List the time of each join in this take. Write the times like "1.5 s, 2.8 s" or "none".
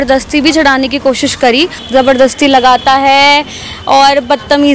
1.8 s